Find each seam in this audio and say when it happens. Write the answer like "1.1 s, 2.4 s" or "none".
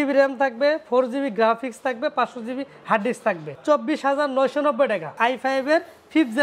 3.5 s, 5.1 s

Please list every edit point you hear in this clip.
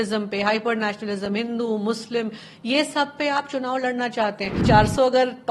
4.6 s

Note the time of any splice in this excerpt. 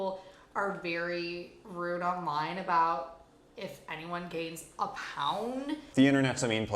1.6 s, 5.8 s

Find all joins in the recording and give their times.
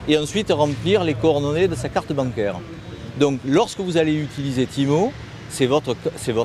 2.1 s

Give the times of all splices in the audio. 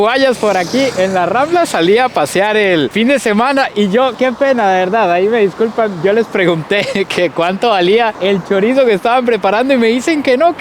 none

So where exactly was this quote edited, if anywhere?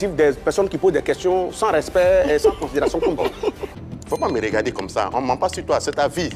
3.6 s

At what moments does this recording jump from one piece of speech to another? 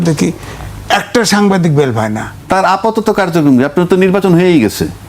2.3 s

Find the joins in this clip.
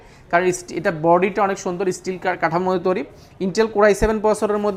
none

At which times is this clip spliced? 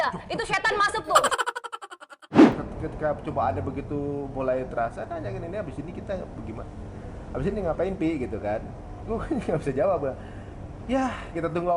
2.6 s

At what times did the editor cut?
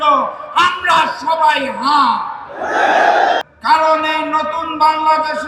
3.4 s

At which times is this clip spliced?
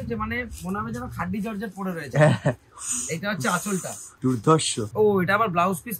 4.0 s, 4.9 s

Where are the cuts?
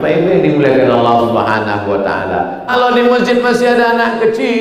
2.7 s

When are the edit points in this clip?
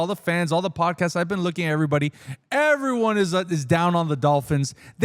none

